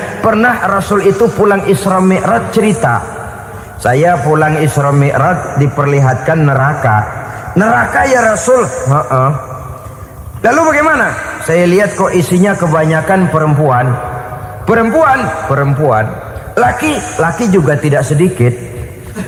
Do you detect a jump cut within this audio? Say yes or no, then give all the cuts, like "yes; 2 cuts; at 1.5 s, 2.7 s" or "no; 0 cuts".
no; 0 cuts